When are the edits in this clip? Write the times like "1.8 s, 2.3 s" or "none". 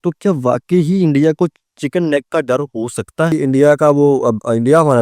3.3 s